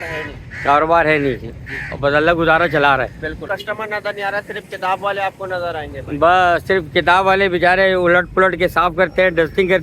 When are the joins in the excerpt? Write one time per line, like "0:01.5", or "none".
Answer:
0:03.4